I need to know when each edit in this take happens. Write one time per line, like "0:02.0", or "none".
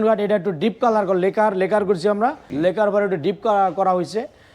0:02.4